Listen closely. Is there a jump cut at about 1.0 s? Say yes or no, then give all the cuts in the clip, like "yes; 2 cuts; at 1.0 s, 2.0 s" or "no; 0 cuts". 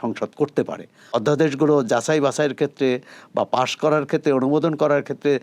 yes; 1 cut; at 1.0 s